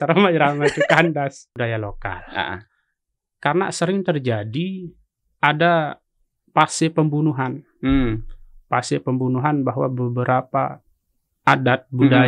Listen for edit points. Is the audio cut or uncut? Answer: cut